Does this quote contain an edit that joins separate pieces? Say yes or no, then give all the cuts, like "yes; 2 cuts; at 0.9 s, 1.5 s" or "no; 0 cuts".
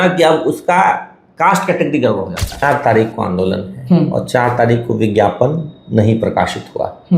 yes; 1 cut; at 2.6 s